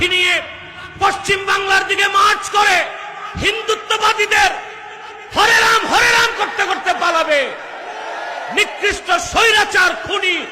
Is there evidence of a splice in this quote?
no; 0 cuts

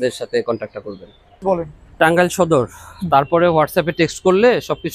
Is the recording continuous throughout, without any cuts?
no; 1 cut; at 1.4 s

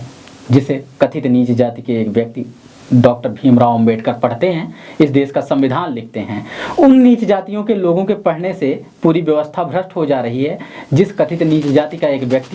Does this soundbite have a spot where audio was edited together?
no; 0 cuts

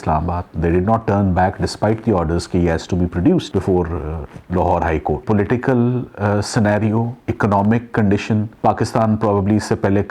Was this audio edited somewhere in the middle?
yes; 3 cuts; at 5.2 s, 7.2 s, 8.5 s

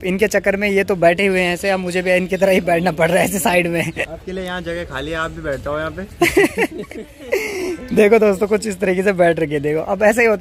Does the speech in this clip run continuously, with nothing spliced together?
yes; 0 cuts

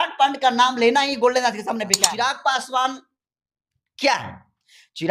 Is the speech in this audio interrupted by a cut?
yes; 1 cut; at 2.0 s

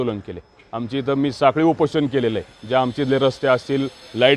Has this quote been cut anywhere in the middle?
no; 0 cuts

